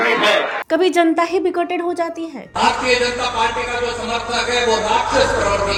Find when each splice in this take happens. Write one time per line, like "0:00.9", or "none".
none

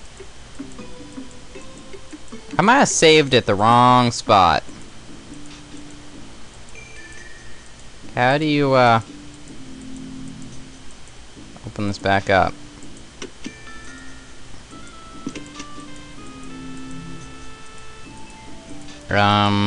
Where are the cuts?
none

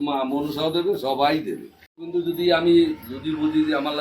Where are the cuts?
0:02.0

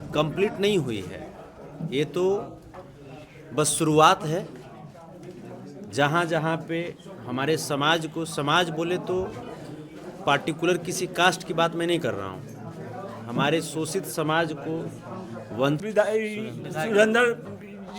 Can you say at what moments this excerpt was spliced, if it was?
0:15.8

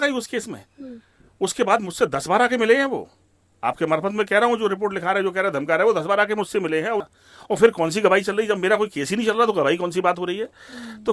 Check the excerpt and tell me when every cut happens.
0:07.0

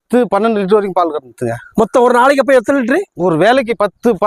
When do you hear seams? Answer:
none

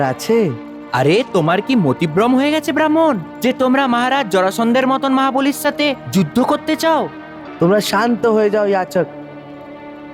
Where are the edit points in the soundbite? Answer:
none

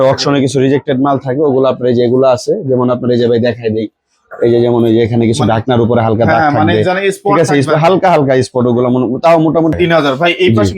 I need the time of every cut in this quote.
0:09.8

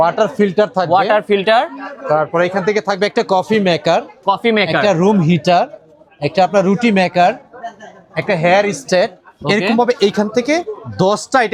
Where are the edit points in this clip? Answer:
none

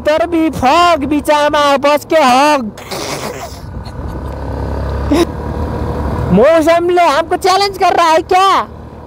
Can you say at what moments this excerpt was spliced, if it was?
0:05.2

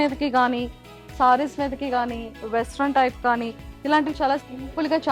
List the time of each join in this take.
none

